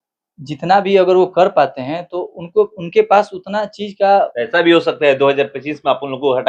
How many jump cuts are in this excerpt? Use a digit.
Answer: 1